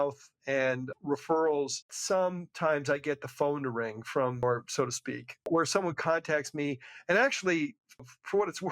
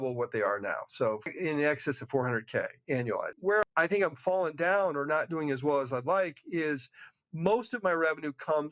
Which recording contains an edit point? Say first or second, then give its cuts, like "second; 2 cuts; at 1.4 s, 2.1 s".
second; 2 cuts; at 1.2 s, 3.4 s